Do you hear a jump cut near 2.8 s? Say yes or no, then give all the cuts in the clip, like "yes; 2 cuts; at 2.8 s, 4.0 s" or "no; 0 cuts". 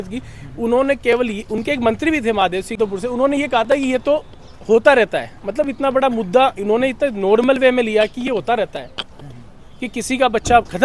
yes; 1 cut; at 2.8 s